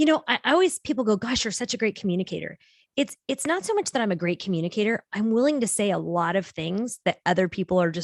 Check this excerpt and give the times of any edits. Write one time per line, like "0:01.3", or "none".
none